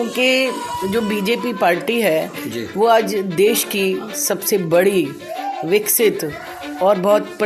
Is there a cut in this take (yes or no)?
no